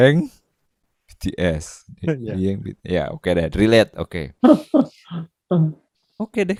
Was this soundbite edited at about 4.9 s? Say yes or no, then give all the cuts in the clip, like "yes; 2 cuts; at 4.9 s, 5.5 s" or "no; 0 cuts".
no; 0 cuts